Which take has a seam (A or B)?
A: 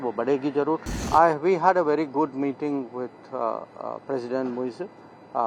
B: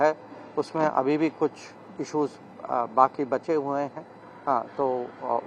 A